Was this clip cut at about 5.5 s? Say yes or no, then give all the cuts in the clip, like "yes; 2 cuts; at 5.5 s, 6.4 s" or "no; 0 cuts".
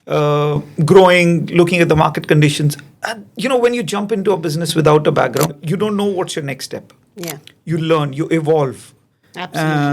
yes; 1 cut; at 5.5 s